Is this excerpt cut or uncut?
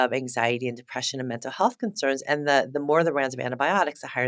uncut